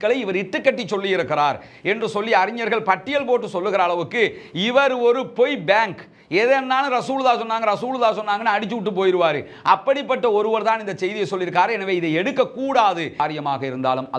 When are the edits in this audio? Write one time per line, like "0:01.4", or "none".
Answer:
0:13.2